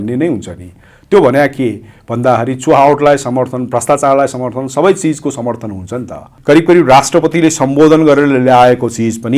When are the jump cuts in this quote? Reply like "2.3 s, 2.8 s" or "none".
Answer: 6.3 s